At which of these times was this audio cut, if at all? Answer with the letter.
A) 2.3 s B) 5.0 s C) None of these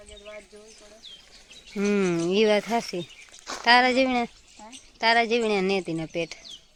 C